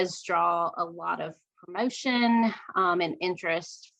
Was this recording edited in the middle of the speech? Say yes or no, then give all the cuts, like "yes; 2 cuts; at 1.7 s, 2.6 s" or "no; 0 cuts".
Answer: no; 0 cuts